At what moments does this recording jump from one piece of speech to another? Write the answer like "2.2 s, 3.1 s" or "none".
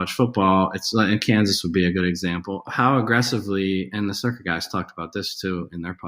2.7 s